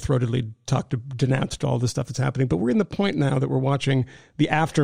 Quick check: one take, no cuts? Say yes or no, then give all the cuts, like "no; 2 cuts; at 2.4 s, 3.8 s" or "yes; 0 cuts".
yes; 0 cuts